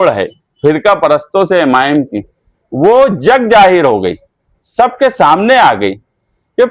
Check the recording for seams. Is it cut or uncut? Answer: uncut